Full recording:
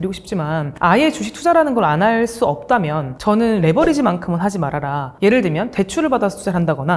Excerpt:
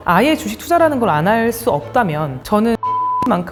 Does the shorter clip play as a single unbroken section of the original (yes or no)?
yes